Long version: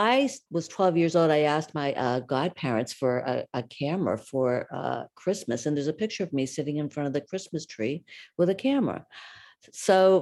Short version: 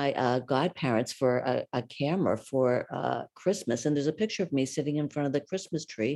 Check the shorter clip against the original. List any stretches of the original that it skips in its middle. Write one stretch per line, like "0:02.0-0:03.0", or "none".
none